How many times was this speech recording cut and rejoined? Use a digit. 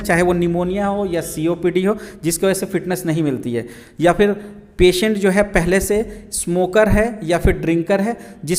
0